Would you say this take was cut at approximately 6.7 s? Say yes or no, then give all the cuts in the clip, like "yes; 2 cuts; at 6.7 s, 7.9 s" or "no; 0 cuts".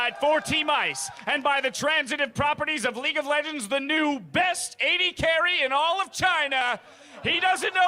no; 0 cuts